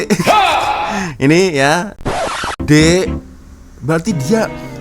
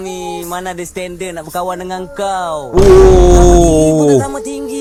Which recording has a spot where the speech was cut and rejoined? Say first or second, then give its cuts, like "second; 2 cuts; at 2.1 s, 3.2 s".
first; 1 cut; at 2.1 s